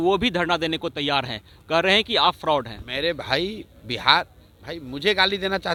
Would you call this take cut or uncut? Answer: uncut